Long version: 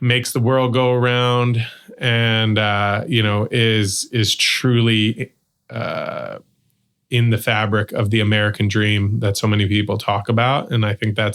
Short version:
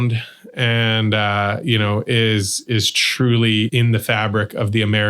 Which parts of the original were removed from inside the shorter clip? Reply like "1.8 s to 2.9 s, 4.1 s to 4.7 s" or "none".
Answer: 5.2 s to 7.1 s